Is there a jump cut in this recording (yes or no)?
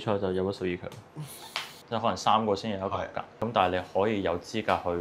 yes